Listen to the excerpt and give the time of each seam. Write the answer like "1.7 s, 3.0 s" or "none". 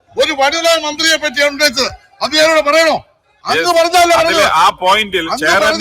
none